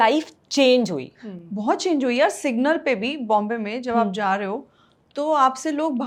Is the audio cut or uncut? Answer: uncut